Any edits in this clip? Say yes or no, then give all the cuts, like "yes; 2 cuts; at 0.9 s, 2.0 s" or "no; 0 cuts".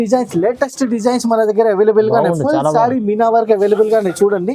no; 0 cuts